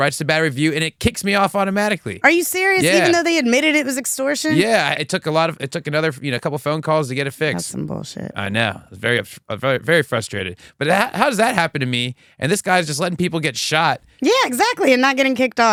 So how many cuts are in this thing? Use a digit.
0